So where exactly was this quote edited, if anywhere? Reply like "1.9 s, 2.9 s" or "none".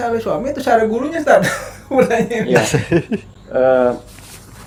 none